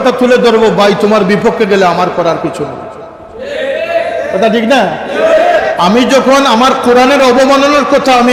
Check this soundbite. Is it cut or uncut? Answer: uncut